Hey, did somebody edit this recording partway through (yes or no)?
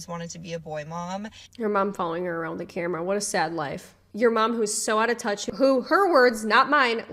yes